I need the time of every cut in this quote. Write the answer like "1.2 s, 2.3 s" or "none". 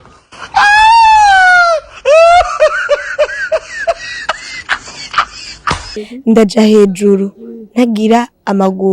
5.9 s

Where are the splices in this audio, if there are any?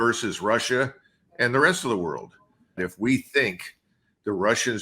2.9 s

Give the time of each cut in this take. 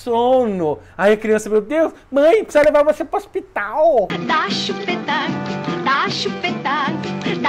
4.1 s

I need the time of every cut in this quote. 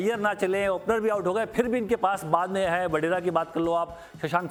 none

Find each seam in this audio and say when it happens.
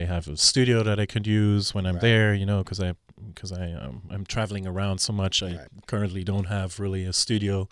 none

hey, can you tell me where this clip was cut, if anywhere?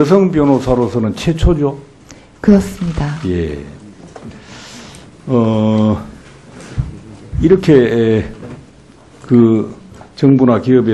none

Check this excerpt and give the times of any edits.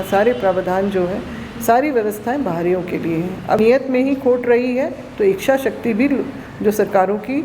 3.6 s

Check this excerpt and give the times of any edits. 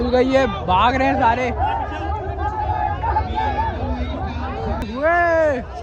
4.9 s

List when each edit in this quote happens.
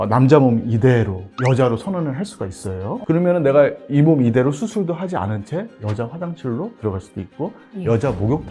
none

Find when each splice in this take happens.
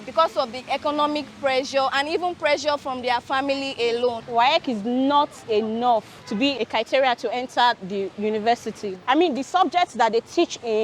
4.2 s, 6.5 s, 9.0 s

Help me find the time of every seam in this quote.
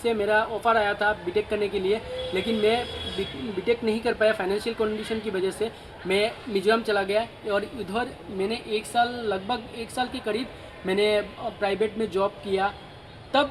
none

